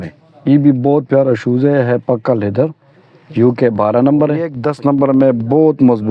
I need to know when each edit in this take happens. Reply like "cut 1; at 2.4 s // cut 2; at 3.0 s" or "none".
cut 1; at 4.6 s

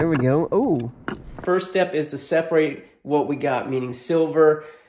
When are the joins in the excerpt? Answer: cut 1; at 1.4 s

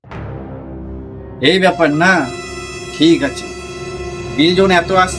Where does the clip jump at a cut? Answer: cut 1; at 1.4 s

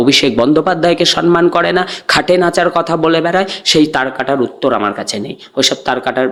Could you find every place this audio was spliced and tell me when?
none

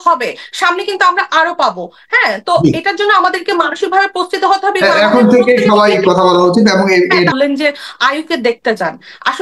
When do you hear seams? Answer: cut 1; at 7.3 s

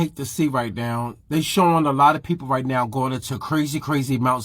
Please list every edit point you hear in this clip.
none

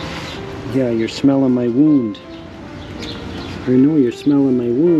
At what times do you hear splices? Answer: none

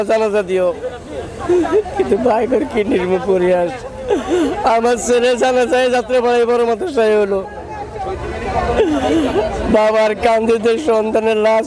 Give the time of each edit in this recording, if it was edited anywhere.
none

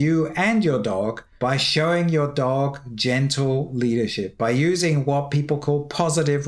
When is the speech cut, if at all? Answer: cut 1; at 1.2 s

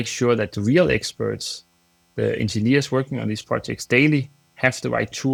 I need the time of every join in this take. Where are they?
none

